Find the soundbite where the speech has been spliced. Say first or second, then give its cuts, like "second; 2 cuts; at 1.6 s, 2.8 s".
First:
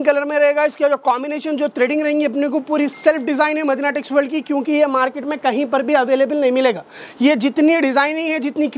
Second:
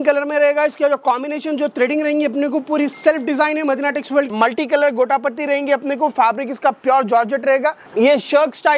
second; 2 cuts; at 4.3 s, 7.8 s